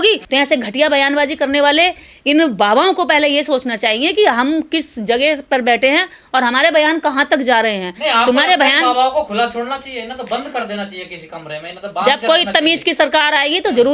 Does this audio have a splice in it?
no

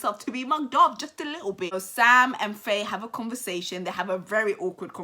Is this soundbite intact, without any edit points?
no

